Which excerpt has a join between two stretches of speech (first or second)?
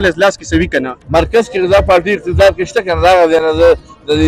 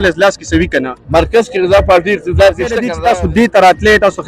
second